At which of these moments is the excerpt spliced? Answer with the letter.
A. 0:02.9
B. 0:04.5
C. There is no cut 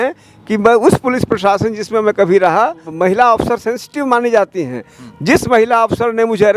A